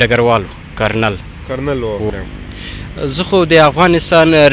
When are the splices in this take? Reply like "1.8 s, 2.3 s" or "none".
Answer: 2.1 s